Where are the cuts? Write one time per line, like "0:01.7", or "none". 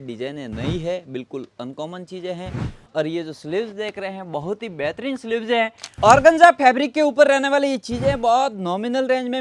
0:05.8